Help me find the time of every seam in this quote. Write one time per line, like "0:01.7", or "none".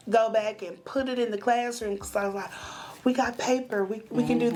none